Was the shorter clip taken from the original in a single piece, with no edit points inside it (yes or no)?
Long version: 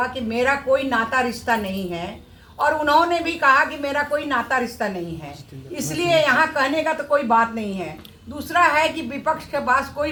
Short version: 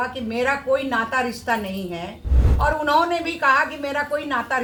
yes